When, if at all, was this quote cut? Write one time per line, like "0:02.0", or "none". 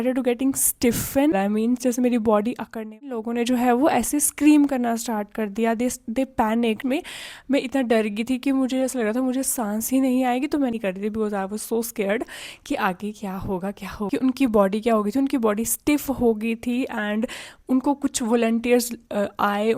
0:01.3
0:03.2
0:06.8
0:10.7
0:14.1